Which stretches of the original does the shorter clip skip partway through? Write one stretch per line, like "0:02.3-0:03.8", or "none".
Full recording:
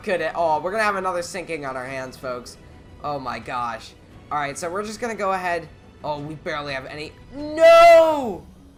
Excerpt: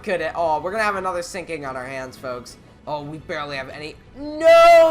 0:02.7-0:05.8